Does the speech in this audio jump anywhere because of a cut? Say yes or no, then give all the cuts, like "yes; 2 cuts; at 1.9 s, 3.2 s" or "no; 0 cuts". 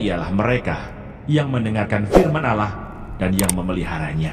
no; 0 cuts